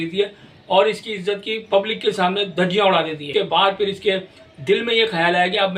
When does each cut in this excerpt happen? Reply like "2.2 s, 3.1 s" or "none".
3.2 s